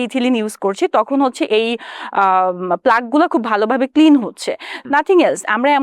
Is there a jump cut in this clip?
yes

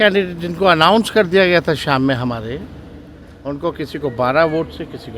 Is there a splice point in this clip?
no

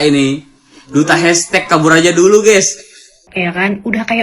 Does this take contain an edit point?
yes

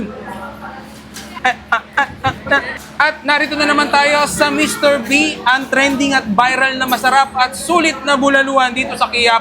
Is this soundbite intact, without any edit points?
no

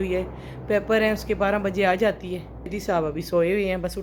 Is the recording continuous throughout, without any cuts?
no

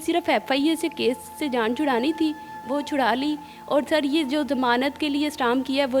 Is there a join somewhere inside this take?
no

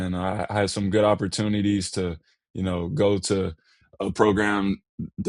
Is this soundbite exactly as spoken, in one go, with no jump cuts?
yes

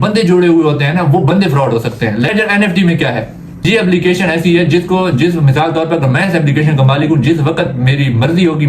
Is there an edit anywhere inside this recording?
yes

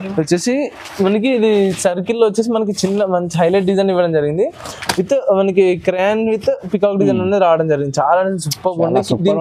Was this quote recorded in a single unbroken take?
yes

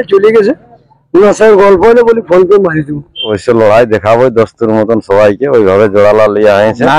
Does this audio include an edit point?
yes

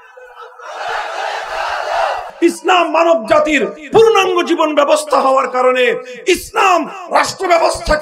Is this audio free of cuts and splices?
no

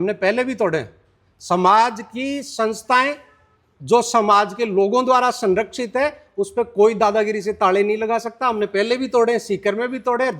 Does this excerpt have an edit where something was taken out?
no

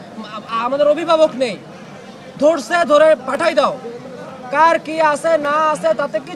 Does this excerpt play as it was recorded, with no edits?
yes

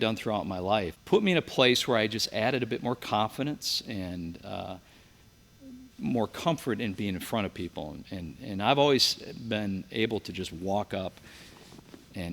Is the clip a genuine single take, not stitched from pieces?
no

